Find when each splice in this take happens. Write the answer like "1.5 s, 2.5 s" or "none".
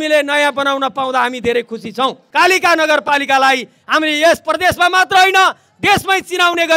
2.2 s